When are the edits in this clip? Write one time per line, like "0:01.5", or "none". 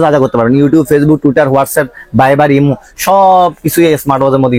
none